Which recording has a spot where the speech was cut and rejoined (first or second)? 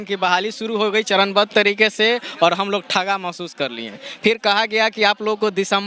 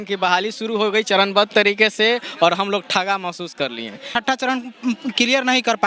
second